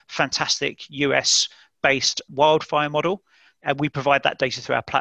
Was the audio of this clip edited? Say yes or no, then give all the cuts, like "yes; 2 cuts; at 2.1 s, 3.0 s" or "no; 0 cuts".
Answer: yes; 2 cuts; at 2.3 s, 3.6 s